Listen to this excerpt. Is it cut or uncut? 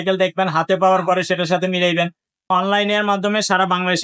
cut